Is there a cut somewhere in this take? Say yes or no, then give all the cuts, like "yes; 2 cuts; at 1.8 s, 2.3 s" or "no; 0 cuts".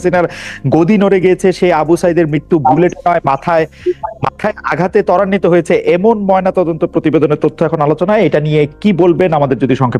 no; 0 cuts